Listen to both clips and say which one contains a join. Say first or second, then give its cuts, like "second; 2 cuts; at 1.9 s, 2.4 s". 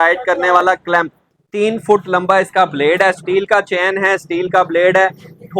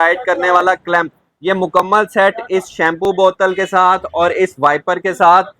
first; 1 cut; at 1.3 s